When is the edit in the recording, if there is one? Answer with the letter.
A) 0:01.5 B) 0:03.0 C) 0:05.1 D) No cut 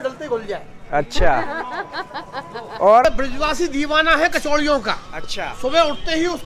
B